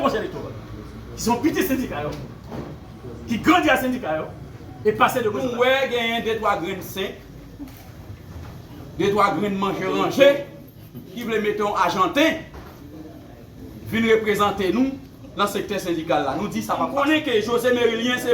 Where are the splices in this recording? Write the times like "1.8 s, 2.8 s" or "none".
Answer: 5.4 s, 16.9 s